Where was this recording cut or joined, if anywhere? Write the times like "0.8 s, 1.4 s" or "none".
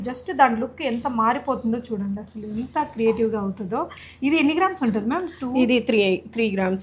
none